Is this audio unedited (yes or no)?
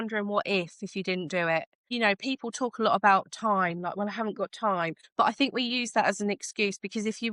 yes